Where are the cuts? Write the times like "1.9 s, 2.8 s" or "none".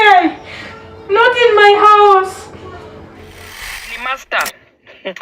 3.7 s